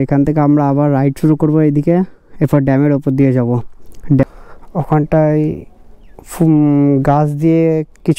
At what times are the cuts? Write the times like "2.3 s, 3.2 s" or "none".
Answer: 4.2 s